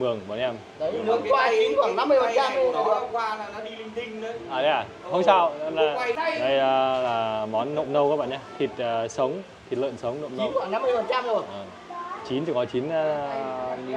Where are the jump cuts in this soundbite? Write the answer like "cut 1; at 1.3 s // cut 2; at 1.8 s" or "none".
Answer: cut 1; at 6.2 s